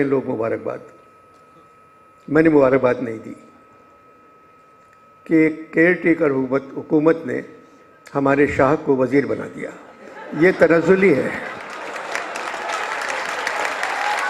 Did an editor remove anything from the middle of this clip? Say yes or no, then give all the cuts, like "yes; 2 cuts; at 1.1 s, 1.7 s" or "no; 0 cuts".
no; 0 cuts